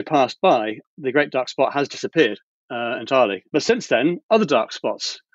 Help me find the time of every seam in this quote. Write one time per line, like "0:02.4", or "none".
0:00.8
0:03.4